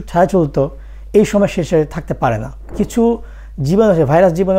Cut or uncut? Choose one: cut